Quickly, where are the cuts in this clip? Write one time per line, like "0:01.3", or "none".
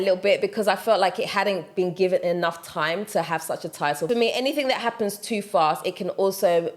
0:04.1